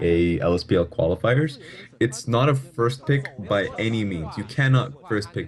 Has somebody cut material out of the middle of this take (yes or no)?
no